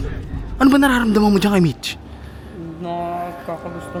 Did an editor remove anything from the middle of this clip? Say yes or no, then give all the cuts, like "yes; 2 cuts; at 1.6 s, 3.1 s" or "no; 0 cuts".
no; 0 cuts